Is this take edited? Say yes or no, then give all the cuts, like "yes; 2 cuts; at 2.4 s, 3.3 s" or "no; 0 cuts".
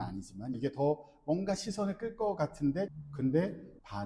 yes; 1 cut; at 3.0 s